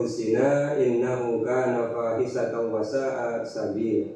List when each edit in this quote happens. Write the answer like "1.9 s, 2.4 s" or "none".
none